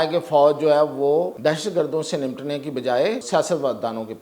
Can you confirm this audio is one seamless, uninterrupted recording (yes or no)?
no